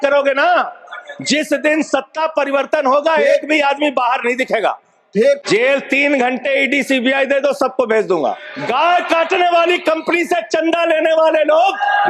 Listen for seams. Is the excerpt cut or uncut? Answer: cut